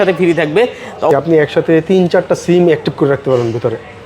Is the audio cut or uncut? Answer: cut